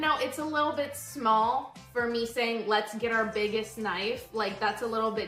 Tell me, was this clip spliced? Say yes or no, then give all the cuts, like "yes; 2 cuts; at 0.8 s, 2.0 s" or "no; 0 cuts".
no; 0 cuts